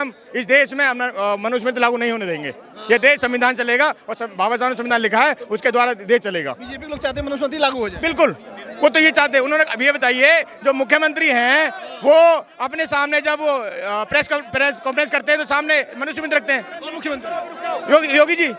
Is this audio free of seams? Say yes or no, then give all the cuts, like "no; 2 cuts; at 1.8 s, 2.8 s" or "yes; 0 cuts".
yes; 0 cuts